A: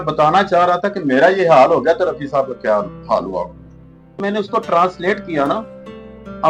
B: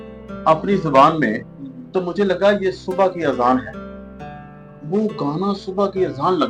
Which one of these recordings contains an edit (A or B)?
A